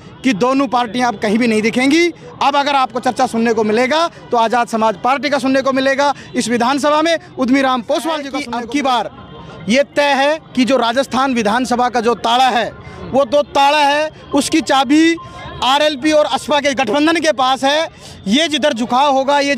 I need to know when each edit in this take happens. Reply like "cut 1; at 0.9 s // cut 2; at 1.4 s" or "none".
cut 1; at 8.4 s